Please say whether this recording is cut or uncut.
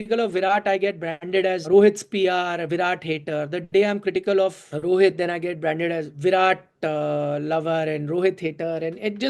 cut